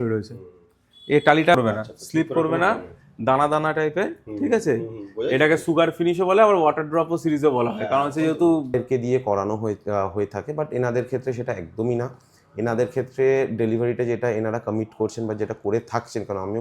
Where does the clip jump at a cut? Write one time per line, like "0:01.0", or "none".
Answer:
0:01.5
0:08.7